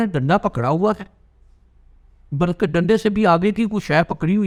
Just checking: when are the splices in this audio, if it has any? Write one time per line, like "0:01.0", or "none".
none